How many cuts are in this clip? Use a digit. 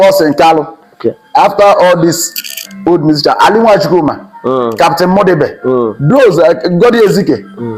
0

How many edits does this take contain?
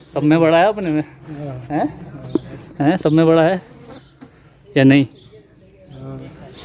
0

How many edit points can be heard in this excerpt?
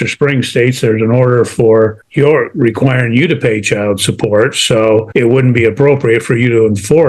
2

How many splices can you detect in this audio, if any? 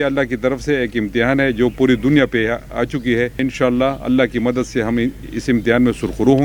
1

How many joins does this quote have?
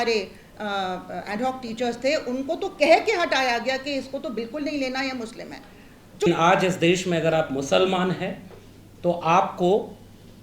1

